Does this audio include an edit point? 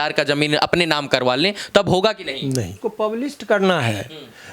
yes; 1 cut; at 2.8 s

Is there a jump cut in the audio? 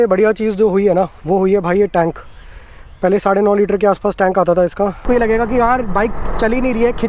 yes; 1 cut; at 5.0 s

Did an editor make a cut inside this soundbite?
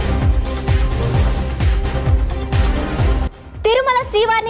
yes; 1 cut; at 3.3 s

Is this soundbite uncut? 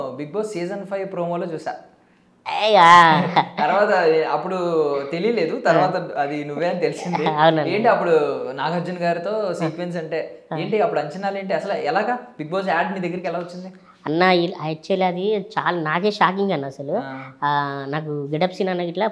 yes; 0 cuts

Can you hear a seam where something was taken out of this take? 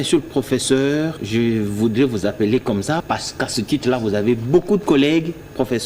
yes; 2 cuts; at 1.2 s, 3.0 s

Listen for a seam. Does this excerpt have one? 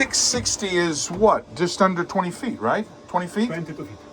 no; 0 cuts

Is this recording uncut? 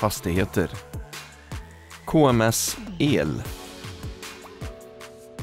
yes; 0 cuts

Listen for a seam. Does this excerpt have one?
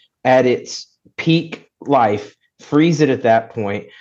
no; 0 cuts

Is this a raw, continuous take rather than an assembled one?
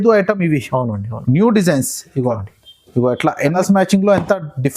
no; 1 cut; at 3.4 s

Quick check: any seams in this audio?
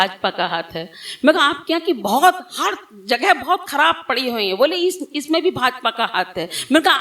no; 0 cuts

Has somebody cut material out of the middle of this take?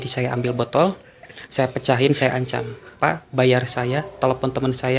no; 0 cuts

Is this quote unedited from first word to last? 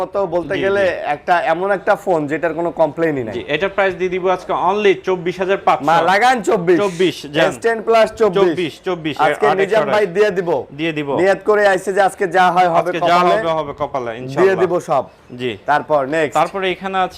yes; 0 cuts

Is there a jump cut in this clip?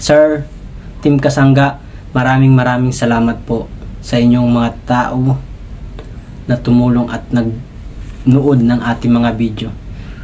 no; 0 cuts

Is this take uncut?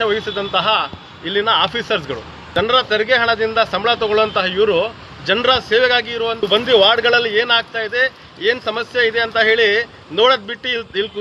no; 2 cuts; at 2.5 s, 6.5 s

